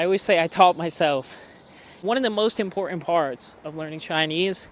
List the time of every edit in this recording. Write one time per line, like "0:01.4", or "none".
0:01.9